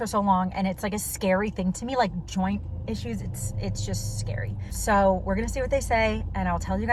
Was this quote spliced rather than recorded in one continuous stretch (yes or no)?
no